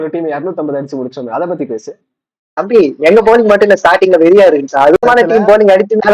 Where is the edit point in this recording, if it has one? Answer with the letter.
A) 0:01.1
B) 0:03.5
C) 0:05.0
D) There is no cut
C